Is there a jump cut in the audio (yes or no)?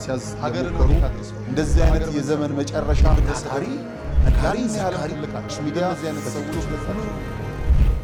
no